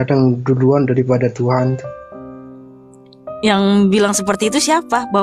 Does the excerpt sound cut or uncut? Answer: cut